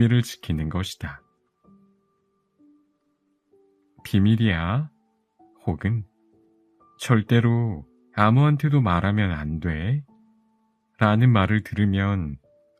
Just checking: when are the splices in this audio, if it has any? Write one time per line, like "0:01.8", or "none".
0:01.9
0:04.0